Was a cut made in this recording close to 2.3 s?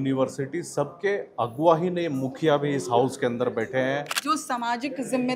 no; 1 cut; at 4.1 s

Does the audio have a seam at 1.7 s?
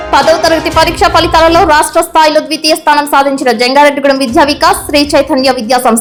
no; 0 cuts

